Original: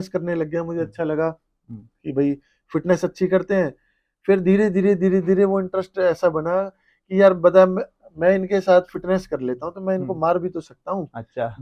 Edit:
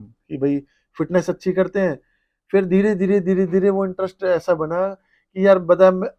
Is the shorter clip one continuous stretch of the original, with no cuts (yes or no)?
yes